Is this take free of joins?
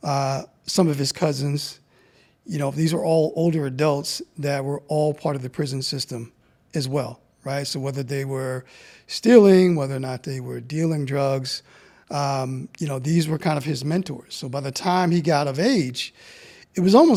yes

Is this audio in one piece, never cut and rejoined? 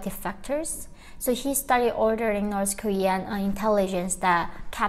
yes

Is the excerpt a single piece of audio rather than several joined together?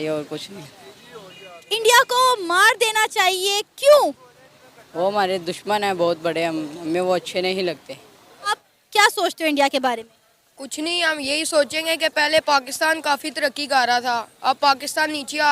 no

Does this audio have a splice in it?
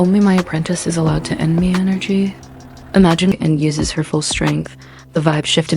yes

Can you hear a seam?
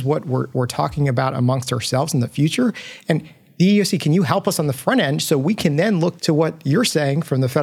yes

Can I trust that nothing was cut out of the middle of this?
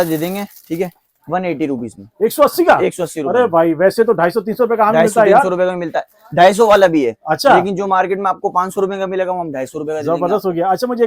yes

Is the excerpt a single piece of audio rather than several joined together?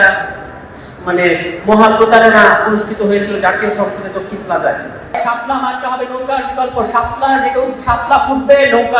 no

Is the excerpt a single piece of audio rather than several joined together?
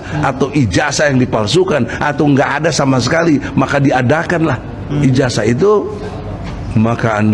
yes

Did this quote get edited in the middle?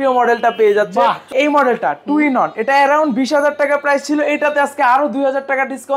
yes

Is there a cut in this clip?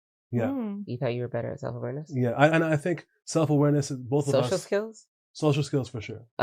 no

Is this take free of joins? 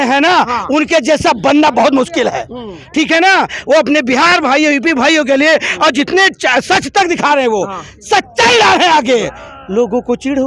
yes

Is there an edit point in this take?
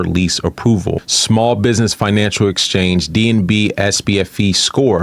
yes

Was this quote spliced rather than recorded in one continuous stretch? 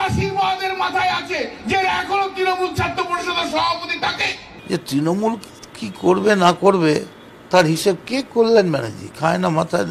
yes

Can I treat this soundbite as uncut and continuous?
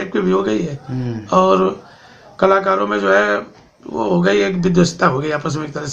yes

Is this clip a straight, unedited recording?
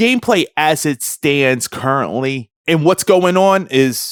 yes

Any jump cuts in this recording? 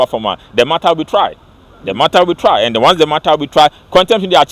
no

